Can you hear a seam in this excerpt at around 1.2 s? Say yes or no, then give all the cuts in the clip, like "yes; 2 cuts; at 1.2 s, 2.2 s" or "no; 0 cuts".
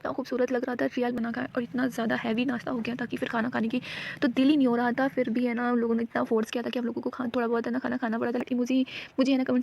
yes; 2 cuts; at 1.2 s, 8.5 s